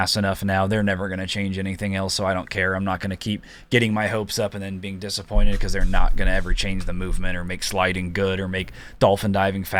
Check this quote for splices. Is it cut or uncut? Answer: uncut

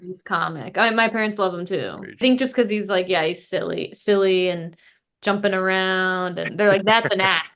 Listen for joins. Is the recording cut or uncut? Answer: cut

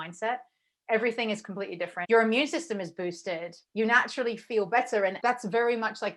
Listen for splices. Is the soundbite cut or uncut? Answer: cut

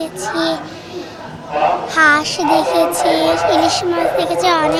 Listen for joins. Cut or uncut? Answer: uncut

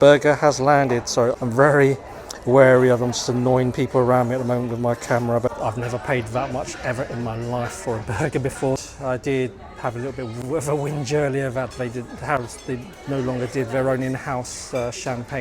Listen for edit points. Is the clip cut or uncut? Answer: cut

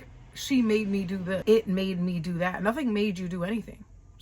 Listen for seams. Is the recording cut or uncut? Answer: cut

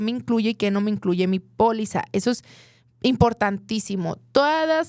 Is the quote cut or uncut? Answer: uncut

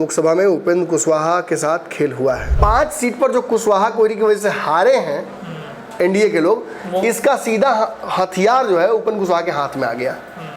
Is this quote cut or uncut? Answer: cut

